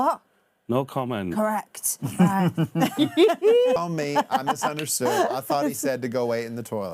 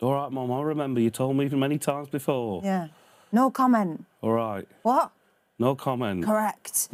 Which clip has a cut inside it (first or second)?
first